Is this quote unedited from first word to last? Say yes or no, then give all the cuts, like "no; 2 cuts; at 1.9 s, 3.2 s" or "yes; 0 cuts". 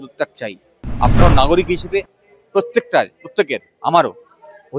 no; 1 cut; at 1.2 s